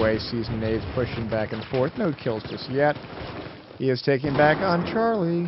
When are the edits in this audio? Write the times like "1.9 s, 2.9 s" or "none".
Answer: 4.6 s